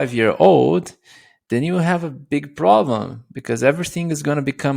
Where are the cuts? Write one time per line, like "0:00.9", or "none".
none